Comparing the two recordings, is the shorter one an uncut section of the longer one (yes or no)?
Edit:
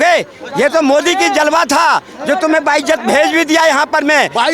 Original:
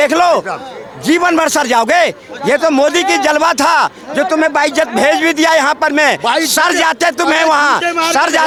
yes